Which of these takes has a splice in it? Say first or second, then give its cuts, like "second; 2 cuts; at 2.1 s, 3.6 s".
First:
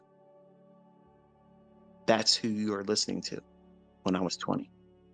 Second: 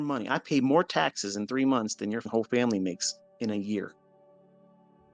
second; 1 cut; at 2.3 s